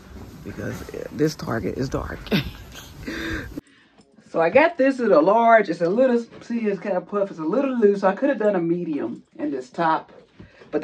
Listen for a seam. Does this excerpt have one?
yes; 1 cut; at 3.6 s

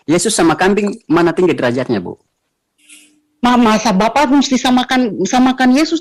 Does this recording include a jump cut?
no; 0 cuts

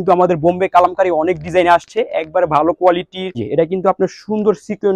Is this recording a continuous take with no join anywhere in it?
no; 1 cut; at 3.4 s

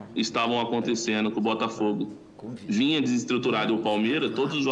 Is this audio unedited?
yes; 0 cuts

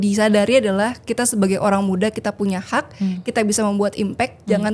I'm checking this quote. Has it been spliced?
no; 0 cuts

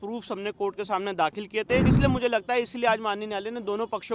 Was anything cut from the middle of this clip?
yes; 1 cut; at 1.9 s

